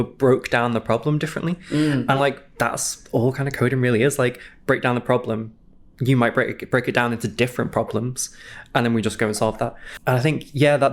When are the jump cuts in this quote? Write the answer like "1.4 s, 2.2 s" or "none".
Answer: 9.9 s